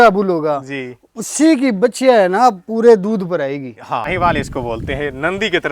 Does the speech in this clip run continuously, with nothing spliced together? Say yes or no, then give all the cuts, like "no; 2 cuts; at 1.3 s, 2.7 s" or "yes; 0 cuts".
no; 1 cut; at 4.1 s